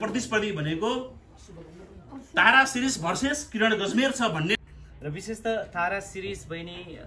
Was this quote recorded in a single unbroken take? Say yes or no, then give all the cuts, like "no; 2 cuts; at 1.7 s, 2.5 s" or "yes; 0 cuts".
no; 1 cut; at 4.6 s